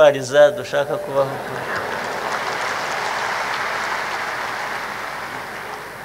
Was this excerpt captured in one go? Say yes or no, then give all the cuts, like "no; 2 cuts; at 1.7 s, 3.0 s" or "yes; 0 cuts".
yes; 0 cuts